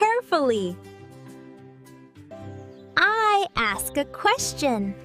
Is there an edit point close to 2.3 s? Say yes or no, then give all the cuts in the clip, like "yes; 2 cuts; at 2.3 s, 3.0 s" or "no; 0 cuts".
yes; 1 cut; at 2.3 s